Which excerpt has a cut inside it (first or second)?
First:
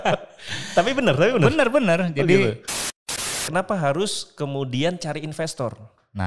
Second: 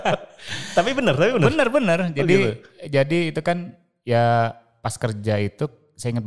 first